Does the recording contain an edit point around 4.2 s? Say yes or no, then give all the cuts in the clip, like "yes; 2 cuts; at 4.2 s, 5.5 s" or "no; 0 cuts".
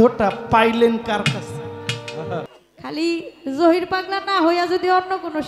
no; 1 cut; at 2.5 s